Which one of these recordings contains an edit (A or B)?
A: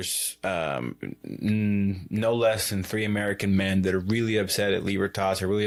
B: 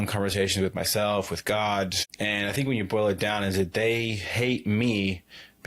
B